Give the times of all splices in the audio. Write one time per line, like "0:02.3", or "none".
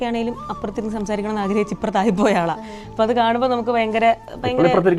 none